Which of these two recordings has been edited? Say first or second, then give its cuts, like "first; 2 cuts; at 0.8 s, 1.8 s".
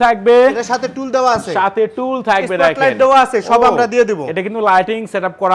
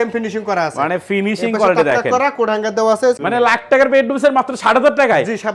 second; 1 cut; at 3.2 s